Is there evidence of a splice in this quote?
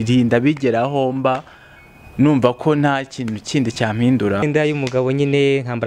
yes; 1 cut; at 4.4 s

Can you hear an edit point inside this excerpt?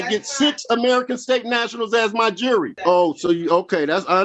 yes; 1 cut; at 2.7 s

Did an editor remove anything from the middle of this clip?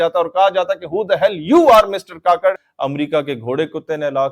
yes; 1 cut; at 2.7 s

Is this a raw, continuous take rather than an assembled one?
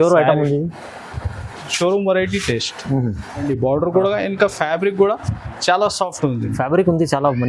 no; 1 cut; at 3.4 s

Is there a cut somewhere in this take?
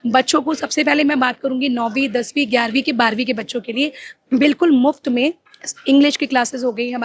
no; 0 cuts

